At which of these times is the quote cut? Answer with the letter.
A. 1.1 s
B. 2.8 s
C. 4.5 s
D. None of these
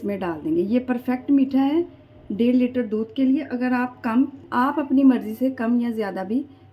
C